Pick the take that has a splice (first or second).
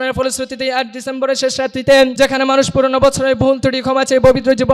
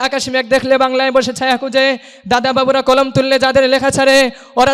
first